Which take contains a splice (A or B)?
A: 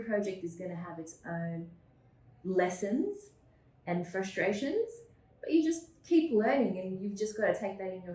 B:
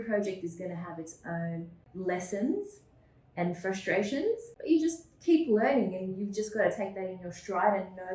B